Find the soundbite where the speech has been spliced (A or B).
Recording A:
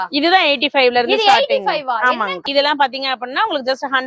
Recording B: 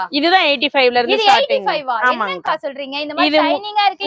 A